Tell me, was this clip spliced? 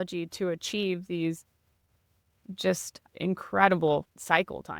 no; 0 cuts

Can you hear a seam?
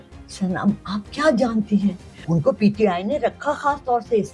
yes; 1 cut; at 2.2 s

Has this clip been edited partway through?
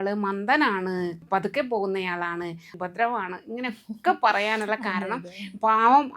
yes; 2 cuts; at 1.2 s, 2.8 s

